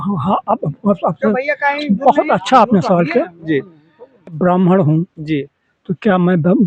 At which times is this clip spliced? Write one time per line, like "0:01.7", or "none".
0:04.4